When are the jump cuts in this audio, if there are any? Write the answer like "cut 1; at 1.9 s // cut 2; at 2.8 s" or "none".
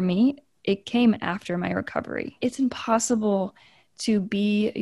cut 1; at 2.4 s